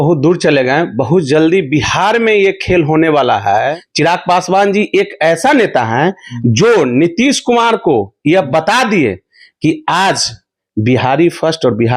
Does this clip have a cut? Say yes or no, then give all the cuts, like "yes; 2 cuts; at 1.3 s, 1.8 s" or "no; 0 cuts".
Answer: yes; 1 cut; at 3.8 s